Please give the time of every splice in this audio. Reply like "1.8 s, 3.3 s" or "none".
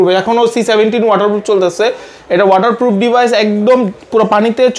none

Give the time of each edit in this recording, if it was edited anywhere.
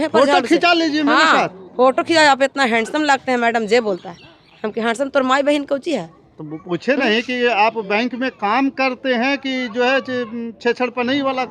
none

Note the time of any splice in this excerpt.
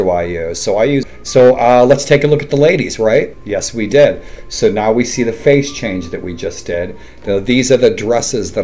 1.0 s, 3.4 s

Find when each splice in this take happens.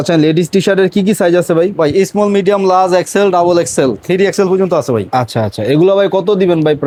none

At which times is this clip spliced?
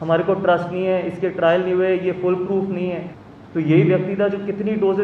3.1 s

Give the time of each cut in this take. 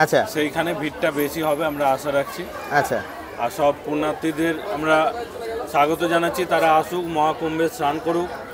none

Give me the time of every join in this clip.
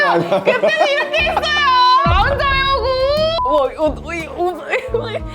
2.0 s, 3.4 s

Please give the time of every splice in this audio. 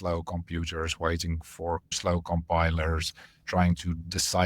1.9 s

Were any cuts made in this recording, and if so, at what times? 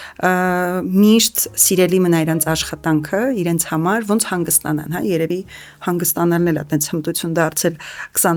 none

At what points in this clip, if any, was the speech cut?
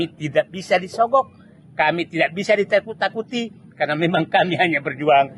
none

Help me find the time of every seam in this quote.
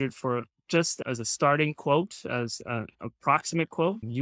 1.0 s

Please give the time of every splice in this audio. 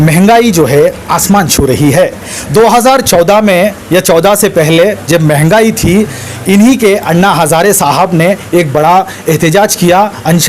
none

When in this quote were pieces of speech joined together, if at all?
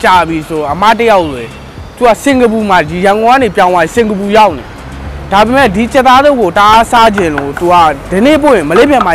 none

